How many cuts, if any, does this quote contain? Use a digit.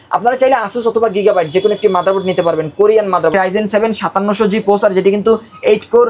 1